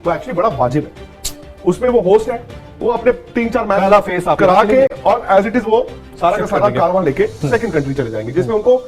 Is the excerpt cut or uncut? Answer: uncut